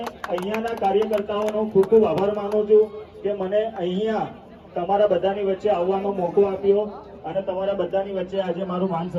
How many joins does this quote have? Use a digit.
0